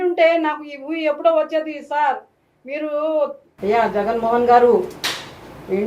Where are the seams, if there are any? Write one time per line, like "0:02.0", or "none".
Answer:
0:03.4